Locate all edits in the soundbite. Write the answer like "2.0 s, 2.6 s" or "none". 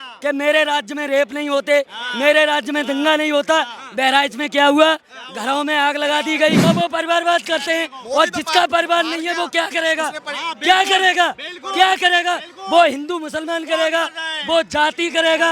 6.6 s

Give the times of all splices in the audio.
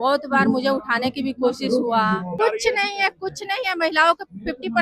2.4 s

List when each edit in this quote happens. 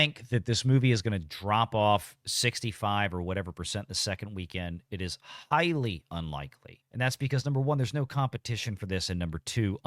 none

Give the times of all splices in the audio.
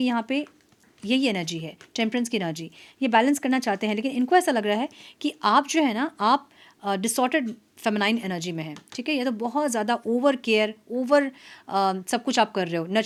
none

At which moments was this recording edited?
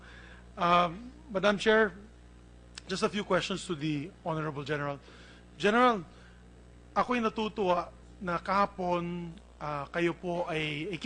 3.6 s

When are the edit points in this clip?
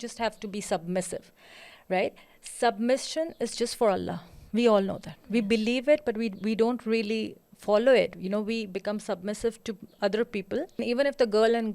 10.8 s

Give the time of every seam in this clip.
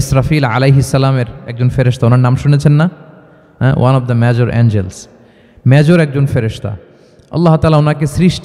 none

